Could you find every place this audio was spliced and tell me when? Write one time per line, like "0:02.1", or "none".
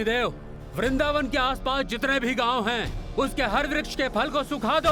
none